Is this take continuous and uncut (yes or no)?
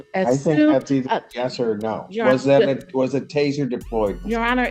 yes